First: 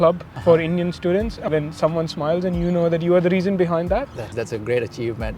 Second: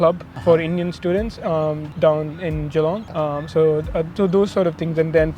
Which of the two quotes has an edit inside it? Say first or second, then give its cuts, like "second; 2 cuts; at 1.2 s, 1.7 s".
first; 2 cuts; at 1.5 s, 4.3 s